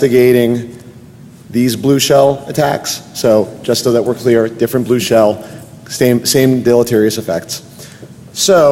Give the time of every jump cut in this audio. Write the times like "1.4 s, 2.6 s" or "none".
none